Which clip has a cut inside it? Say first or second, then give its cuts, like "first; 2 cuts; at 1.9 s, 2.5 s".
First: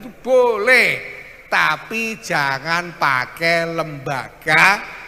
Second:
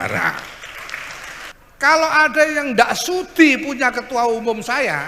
second; 1 cut; at 1.5 s